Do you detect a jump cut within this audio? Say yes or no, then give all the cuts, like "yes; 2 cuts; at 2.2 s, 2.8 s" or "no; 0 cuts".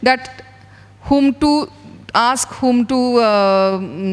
no; 0 cuts